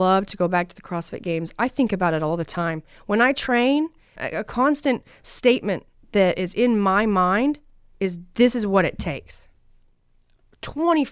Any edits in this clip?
yes; 1 cut; at 4.2 s

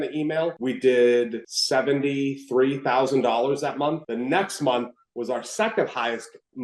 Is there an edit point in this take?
no; 0 cuts

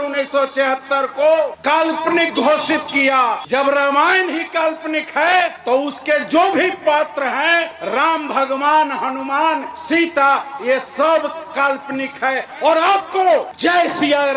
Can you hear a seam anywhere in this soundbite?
yes; 6 cuts; at 1.6 s, 3.4 s, 5.6 s, 7.8 s, 9.7 s, 13.5 s

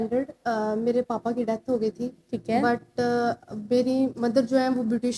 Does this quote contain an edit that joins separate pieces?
no; 0 cuts

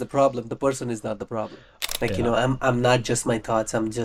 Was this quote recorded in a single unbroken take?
no; 1 cut; at 1.7 s

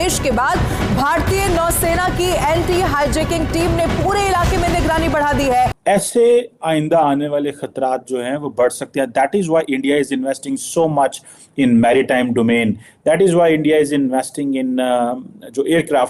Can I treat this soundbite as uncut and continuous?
no; 1 cut; at 5.8 s

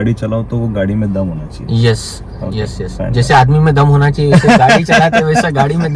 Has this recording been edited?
no; 0 cuts

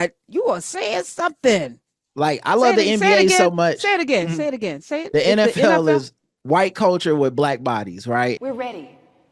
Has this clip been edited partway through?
yes; 1 cut; at 8.4 s

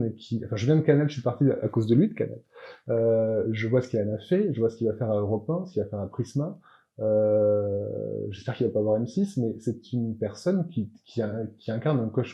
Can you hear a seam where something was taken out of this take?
no; 0 cuts

